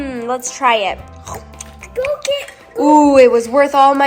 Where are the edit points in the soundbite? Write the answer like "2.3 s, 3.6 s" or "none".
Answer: none

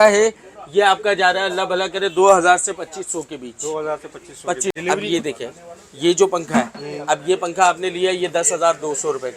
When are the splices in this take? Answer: 4.7 s

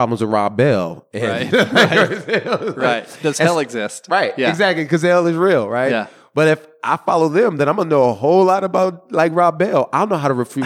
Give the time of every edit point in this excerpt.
none

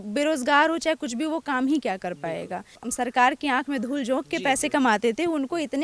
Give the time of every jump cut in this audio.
2.8 s

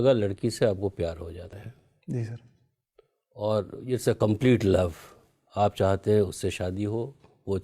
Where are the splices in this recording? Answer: 1.5 s

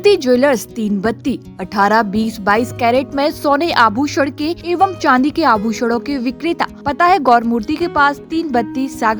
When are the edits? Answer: 4.6 s, 6.8 s

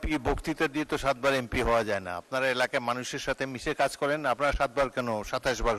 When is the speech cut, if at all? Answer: none

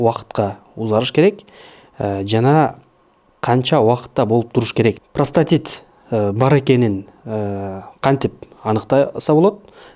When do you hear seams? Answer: 5.0 s

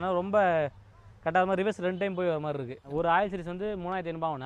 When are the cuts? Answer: 2.8 s

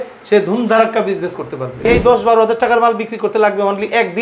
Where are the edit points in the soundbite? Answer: 1.9 s

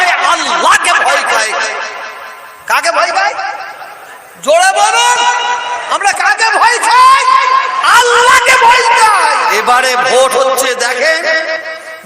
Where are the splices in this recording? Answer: 9.6 s

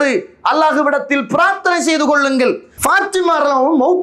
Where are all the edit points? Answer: 2.7 s

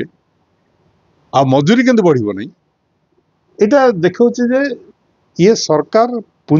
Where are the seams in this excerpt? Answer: none

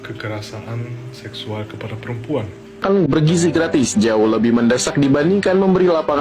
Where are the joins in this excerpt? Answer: 2.6 s

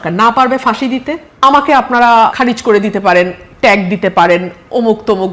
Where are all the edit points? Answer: 1.2 s, 2.3 s

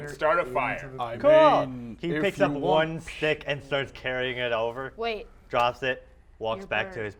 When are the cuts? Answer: none

